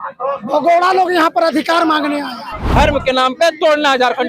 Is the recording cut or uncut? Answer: cut